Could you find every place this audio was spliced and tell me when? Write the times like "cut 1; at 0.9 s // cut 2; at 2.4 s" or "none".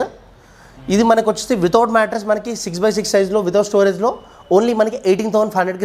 none